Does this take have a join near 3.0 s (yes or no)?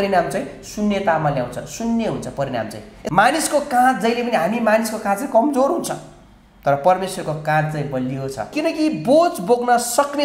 yes